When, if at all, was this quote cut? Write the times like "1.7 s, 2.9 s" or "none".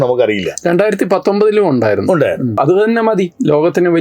2.6 s